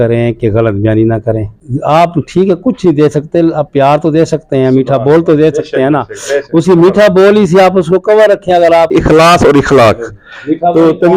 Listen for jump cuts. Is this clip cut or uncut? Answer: cut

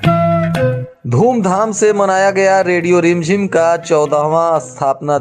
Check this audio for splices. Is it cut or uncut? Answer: cut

